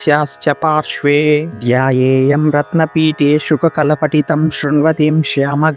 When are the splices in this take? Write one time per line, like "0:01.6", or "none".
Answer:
0:01.5

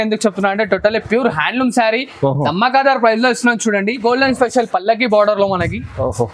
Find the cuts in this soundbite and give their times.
0:04.0

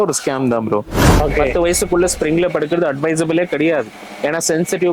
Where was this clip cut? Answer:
0:01.1

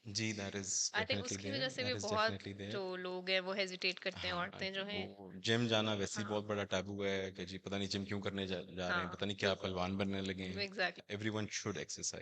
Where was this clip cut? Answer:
0:11.0

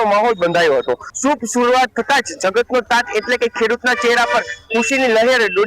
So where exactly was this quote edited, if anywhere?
0:01.1

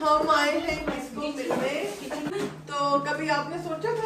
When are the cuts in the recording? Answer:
0:02.3

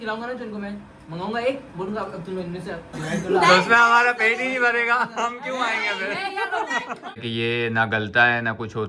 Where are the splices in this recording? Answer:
0:07.2

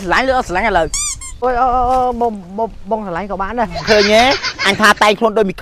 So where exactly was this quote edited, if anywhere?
0:01.4
0:03.8

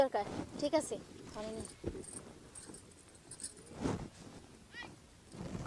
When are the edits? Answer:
none

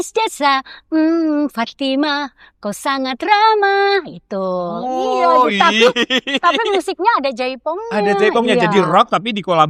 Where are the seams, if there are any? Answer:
none

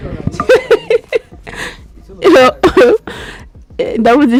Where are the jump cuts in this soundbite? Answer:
none

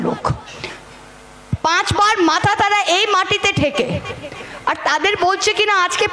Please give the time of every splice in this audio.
none

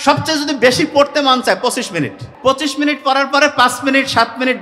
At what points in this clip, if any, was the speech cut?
0:02.2

